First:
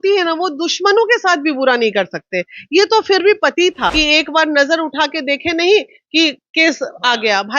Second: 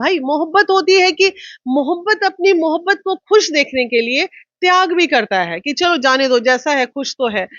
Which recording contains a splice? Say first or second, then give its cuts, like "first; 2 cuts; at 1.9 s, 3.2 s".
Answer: first; 1 cut; at 3.9 s